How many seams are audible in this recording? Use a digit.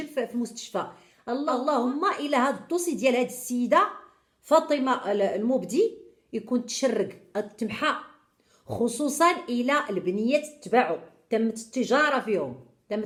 0